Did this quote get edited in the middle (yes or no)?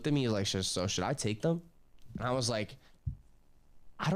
no